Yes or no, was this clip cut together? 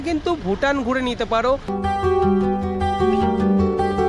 yes